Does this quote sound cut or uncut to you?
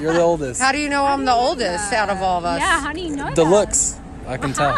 uncut